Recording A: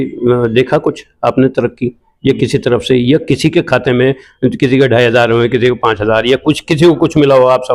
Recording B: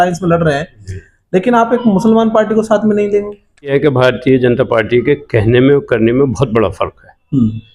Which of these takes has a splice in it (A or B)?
B